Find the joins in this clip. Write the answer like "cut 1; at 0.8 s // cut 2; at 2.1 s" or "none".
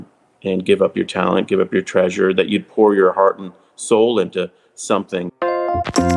cut 1; at 5.2 s